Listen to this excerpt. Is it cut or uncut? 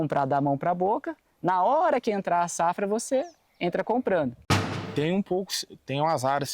cut